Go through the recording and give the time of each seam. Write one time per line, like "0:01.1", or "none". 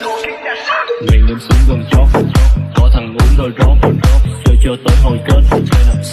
none